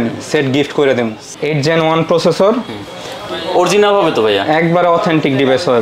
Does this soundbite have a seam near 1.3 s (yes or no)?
yes